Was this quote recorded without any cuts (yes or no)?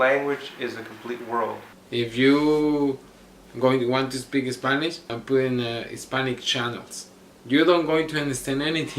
no